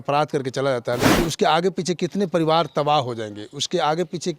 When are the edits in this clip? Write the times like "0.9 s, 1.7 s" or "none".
1.1 s